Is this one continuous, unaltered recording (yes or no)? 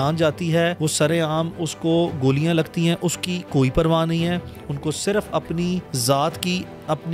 no